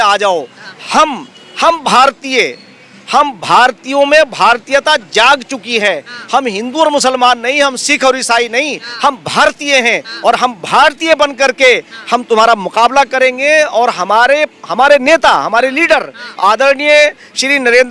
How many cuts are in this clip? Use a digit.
0